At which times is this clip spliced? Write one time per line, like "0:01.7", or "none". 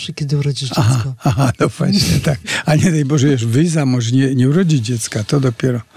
0:02.5